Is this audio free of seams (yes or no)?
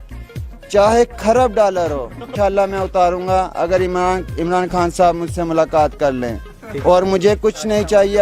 no